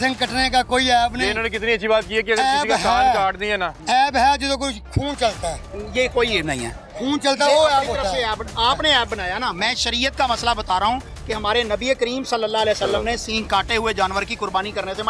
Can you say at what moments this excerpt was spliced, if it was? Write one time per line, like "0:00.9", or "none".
none